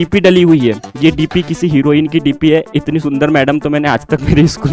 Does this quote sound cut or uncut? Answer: uncut